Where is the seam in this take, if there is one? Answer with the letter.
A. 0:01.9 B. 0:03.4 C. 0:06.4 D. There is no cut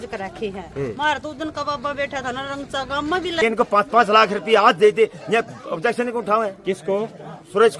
B